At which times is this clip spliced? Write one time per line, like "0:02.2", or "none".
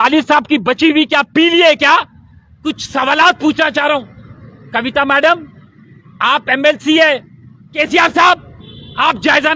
0:02.6
0:07.7